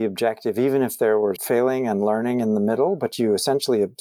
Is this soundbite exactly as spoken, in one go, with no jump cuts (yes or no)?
no